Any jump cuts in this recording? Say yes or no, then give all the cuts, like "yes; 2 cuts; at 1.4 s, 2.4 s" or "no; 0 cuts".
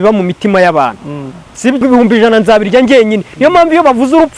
yes; 1 cut; at 1.8 s